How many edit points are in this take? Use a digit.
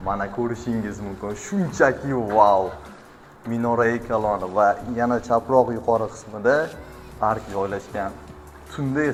0